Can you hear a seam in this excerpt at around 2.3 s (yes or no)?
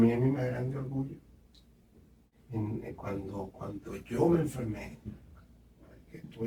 yes